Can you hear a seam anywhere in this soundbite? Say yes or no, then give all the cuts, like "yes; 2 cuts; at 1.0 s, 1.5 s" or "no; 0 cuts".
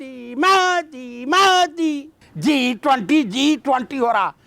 yes; 1 cut; at 2.2 s